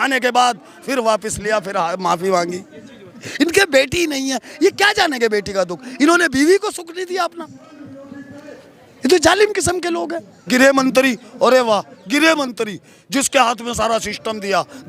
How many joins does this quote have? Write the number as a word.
two